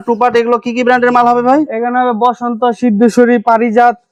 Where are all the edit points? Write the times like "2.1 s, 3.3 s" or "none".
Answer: none